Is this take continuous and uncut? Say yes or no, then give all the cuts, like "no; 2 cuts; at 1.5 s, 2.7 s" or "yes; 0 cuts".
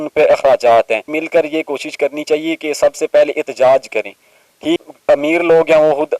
no; 2 cuts; at 1.1 s, 4.8 s